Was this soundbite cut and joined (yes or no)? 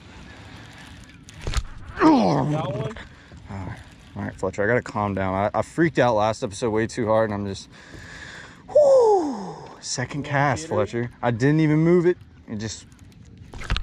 no